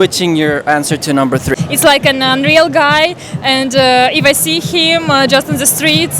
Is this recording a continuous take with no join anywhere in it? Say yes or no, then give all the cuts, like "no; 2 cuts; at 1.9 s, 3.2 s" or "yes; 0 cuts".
no; 1 cut; at 1.6 s